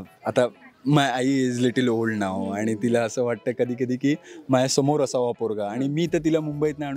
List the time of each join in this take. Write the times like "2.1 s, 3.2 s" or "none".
none